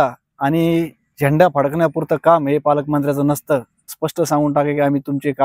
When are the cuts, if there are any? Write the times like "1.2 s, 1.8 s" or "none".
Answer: 4.0 s